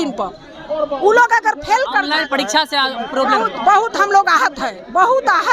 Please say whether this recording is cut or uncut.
uncut